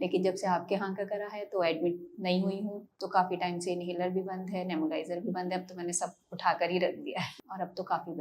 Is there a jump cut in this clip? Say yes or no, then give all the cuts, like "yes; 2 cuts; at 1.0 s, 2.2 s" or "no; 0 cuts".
yes; 2 cuts; at 2.9 s, 7.3 s